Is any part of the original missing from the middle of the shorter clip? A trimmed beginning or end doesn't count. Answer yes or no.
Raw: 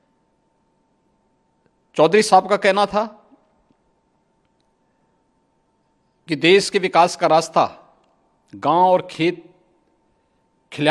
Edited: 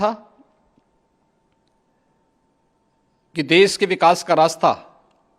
no